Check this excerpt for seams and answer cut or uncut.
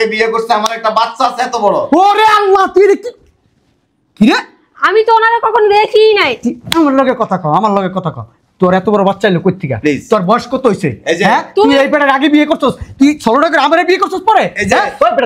uncut